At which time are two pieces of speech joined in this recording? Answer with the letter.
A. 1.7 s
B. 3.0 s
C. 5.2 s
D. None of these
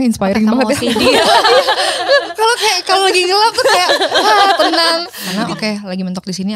C